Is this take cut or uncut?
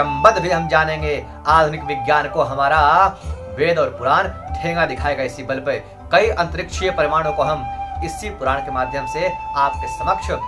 uncut